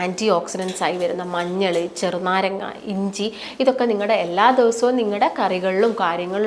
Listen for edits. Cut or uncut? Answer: uncut